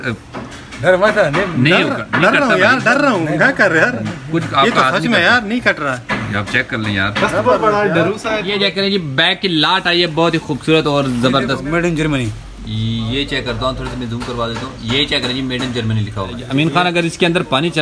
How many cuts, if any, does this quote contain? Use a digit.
3